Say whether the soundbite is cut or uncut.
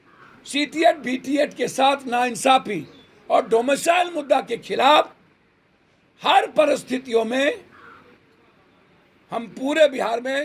uncut